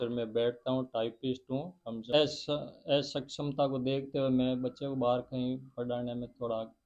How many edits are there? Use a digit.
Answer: 1